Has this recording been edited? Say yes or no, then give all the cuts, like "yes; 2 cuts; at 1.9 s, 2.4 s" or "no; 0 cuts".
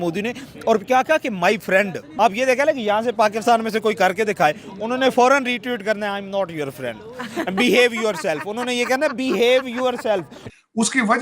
yes; 1 cut; at 2.0 s